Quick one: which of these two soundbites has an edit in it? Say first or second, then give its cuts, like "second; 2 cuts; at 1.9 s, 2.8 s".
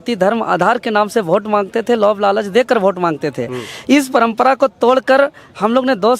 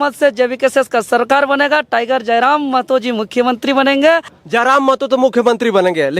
second; 1 cut; at 4.3 s